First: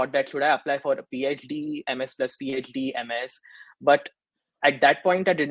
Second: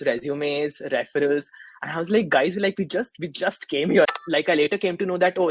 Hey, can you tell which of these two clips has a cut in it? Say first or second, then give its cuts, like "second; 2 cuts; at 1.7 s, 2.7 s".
second; 1 cut; at 4.1 s